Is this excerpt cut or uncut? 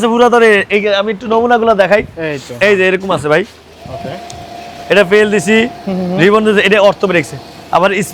uncut